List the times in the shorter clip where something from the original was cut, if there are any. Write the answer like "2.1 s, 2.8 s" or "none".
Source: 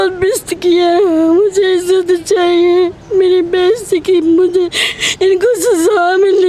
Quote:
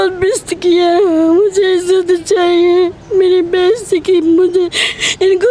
none